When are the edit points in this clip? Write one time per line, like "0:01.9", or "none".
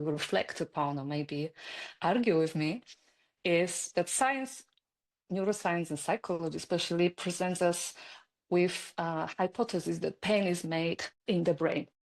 0:11.1